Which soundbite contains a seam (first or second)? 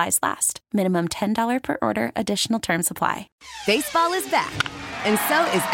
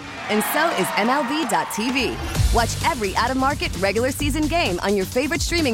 first